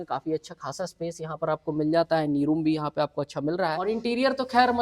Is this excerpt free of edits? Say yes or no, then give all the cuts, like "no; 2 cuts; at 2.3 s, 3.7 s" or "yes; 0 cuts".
no; 1 cut; at 3.9 s